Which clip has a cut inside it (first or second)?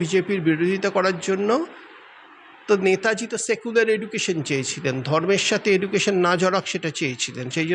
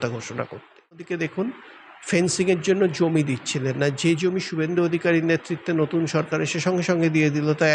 second